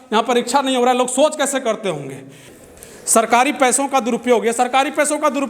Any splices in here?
yes; 1 cut; at 2.4 s

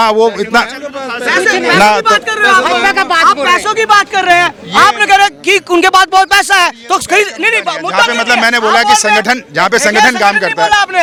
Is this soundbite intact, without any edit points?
yes; 0 cuts

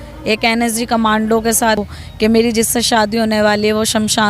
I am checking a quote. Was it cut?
yes; 1 cut; at 1.8 s

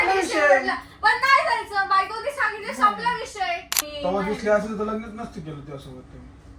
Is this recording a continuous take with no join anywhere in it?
no; 1 cut; at 3.8 s

